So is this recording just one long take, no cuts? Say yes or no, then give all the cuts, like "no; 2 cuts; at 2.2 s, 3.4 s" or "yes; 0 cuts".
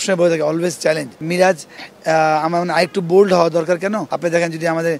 no; 2 cuts; at 1.1 s, 4.1 s